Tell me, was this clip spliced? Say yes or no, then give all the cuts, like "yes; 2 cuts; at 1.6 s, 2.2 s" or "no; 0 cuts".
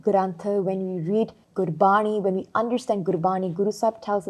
yes; 1 cut; at 1.4 s